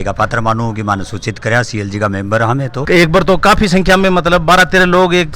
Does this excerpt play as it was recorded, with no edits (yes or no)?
no